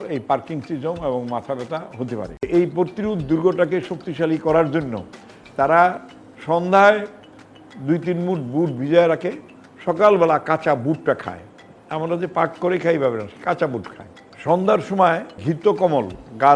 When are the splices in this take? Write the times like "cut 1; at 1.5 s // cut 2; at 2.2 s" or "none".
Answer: cut 1; at 2.5 s